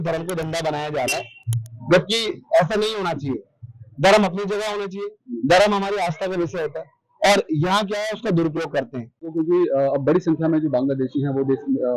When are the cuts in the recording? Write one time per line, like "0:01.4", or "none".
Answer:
none